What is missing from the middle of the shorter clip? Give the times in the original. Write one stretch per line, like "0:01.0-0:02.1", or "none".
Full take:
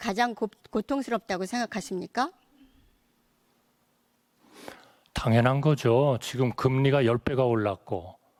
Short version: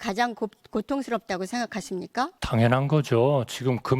0:02.4-0:05.1

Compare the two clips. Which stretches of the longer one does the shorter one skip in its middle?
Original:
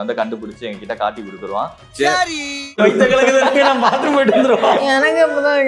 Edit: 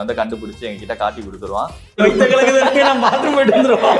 0:01.8-0:02.6

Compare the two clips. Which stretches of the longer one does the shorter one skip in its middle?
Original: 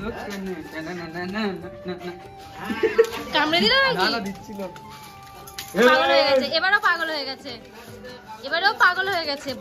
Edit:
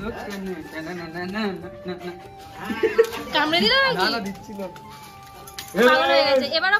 none

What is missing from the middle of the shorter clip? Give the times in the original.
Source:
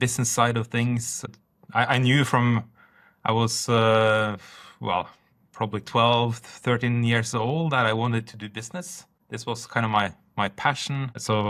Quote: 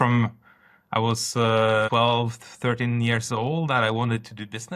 0:04.2-0:05.9

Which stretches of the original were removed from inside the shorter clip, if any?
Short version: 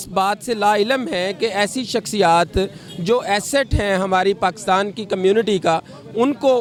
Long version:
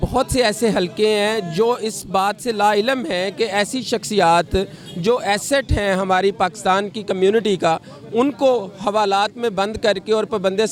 none

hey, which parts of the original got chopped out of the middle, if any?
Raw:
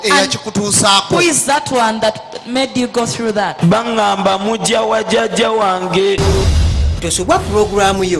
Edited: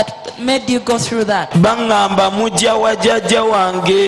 none

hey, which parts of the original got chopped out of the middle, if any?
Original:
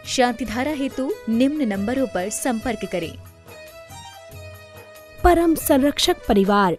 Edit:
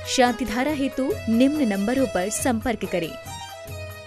0:03.1-0:03.8

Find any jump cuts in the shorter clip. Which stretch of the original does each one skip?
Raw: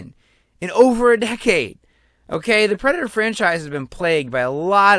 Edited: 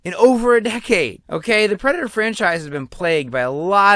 0:01.8-0:02.3

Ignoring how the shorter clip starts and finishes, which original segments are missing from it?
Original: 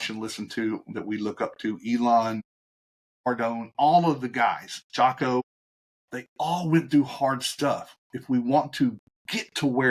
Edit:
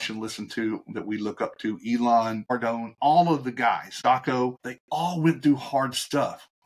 0:02.4-0:03.2
0:04.7-0:04.8
0:05.6-0:06.2

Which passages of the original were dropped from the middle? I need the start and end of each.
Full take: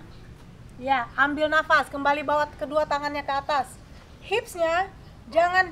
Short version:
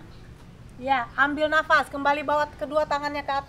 none

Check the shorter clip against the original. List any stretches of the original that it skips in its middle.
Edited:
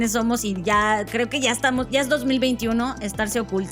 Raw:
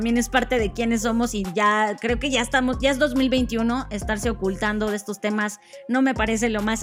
none

